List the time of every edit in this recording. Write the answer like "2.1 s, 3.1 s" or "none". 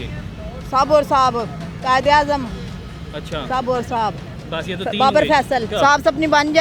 5.7 s